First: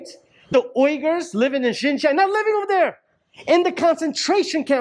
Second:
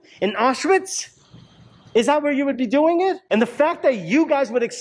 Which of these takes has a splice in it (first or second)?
second